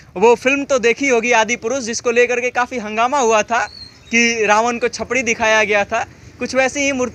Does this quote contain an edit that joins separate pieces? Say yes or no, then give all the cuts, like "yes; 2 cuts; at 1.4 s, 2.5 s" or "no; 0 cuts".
no; 0 cuts